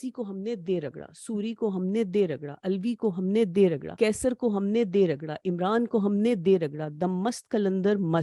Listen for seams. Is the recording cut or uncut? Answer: uncut